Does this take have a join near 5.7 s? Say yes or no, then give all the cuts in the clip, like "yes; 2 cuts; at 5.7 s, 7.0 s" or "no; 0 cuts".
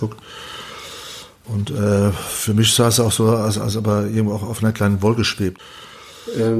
yes; 1 cut; at 5.7 s